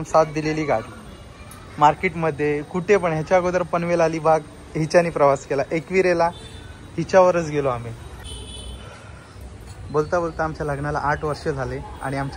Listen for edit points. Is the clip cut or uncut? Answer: uncut